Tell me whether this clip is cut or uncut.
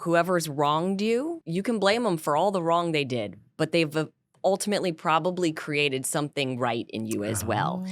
cut